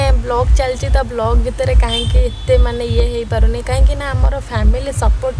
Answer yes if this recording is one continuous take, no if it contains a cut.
yes